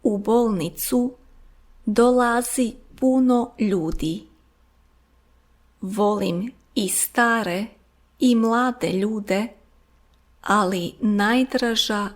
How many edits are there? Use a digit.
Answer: 1